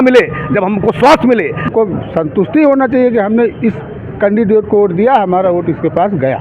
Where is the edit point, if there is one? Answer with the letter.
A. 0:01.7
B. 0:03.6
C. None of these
A